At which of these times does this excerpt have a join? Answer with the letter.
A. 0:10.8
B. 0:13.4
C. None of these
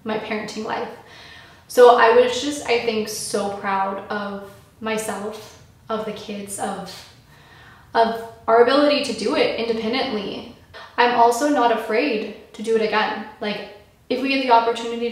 A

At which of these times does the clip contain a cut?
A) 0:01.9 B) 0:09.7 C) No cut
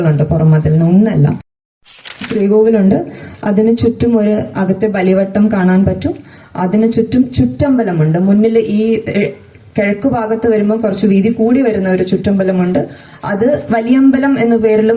A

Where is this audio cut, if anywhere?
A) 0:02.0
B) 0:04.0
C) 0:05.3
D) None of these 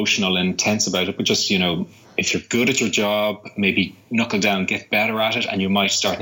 D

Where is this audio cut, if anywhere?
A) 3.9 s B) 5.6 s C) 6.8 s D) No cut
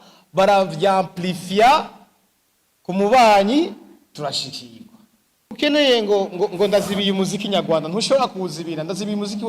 B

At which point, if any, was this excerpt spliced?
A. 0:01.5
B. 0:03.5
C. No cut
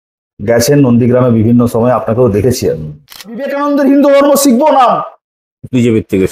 B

